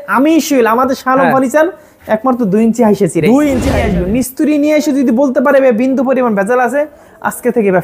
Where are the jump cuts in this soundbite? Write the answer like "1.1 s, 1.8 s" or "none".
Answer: 3.8 s